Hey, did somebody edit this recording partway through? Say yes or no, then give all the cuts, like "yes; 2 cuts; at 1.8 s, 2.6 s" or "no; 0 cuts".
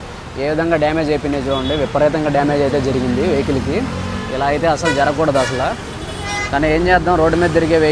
no; 0 cuts